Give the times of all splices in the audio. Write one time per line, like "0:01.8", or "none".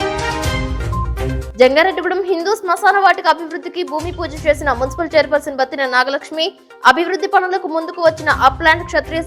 0:01.2